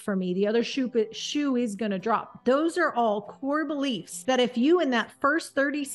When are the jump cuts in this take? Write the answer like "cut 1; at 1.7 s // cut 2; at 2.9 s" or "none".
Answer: cut 1; at 2.3 s // cut 2; at 4.1 s